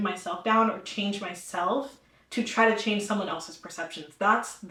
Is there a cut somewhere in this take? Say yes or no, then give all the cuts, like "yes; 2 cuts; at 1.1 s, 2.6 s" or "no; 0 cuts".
no; 0 cuts